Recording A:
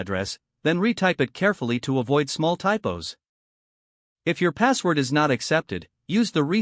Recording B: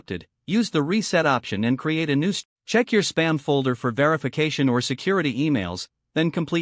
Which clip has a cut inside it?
B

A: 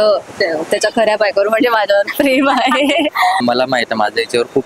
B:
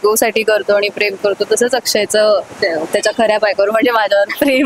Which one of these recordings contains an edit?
A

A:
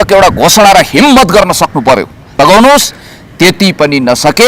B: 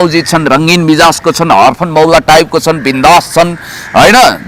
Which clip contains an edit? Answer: A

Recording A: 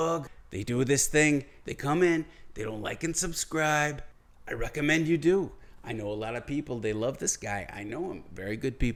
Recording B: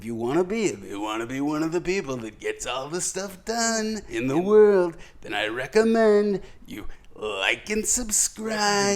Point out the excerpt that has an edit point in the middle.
B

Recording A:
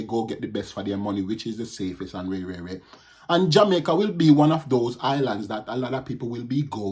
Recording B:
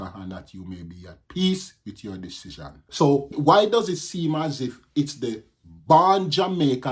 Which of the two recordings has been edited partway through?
B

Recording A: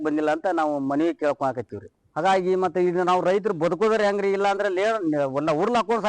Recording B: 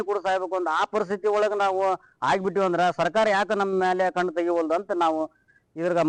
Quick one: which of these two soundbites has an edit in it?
A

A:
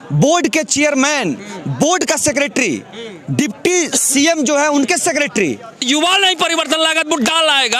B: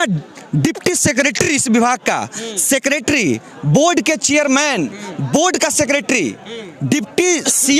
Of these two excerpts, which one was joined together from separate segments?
A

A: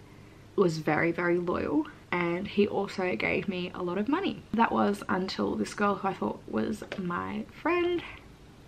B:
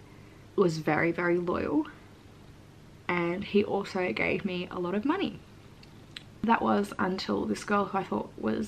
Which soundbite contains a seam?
A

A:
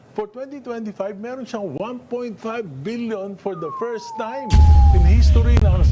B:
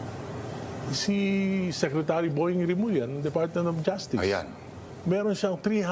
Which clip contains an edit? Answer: A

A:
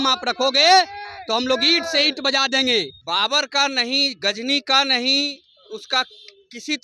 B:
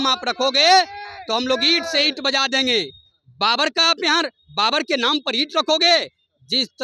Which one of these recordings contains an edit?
A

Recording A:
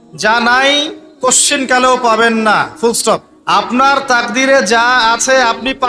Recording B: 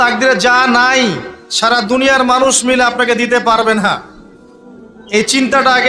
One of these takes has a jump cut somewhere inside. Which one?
A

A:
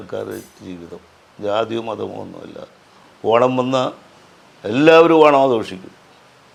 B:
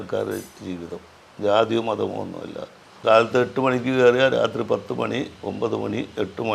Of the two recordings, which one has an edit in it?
B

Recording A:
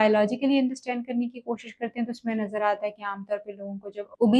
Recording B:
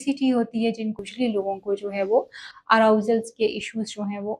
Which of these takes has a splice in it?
B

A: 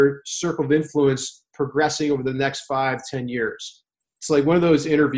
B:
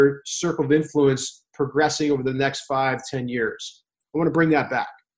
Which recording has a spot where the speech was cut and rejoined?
B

